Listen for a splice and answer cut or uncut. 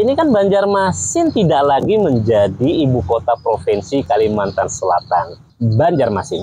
cut